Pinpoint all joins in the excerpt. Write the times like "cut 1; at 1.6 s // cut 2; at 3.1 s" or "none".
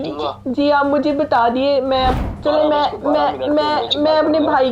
cut 1; at 2.2 s